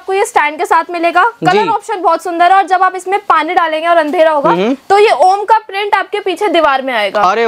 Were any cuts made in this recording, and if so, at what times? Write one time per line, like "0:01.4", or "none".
none

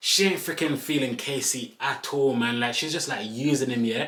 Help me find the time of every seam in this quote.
none

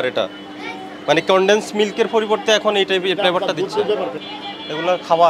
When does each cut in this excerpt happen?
0:04.3

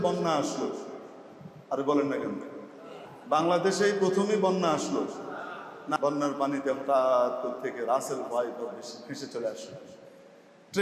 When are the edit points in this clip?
0:06.0

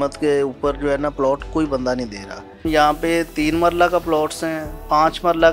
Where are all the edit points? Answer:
0:02.6

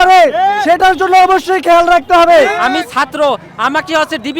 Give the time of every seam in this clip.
0:02.5

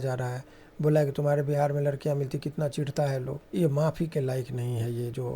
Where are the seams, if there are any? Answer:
0:03.4

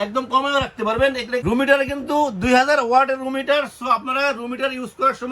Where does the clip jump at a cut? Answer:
0:01.4

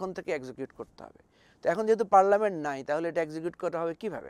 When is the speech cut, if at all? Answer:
none

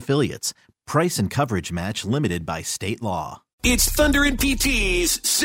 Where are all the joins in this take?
0:03.5

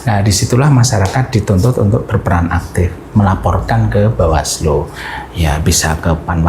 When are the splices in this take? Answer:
none

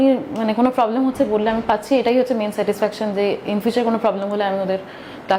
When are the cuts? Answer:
none

